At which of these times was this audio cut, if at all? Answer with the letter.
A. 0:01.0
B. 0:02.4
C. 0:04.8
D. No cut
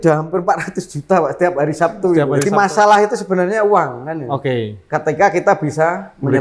B